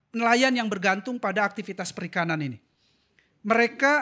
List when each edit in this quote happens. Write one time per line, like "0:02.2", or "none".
none